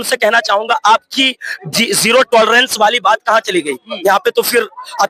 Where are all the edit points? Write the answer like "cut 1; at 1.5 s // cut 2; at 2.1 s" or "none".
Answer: none